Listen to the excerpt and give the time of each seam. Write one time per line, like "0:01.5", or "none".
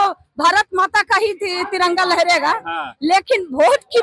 none